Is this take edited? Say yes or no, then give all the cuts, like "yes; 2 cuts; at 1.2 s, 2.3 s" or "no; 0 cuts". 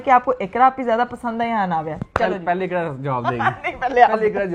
no; 0 cuts